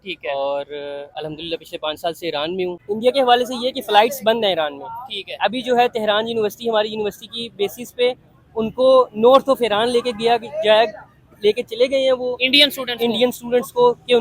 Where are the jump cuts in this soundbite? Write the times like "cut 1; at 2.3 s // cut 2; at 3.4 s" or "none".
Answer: cut 1; at 2.8 s